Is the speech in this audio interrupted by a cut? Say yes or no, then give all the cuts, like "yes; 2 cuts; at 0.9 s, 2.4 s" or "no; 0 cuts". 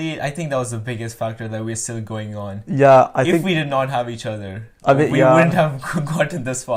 no; 0 cuts